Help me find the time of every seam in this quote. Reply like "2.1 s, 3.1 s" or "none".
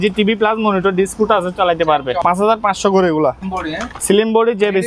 2.2 s, 3.5 s

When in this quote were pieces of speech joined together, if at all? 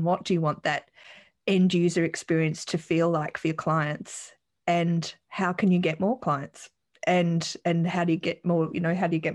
none

